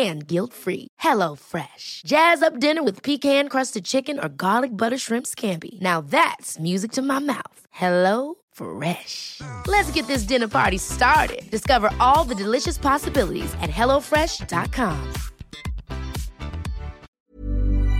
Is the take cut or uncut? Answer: cut